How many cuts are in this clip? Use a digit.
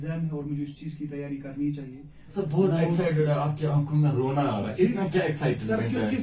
1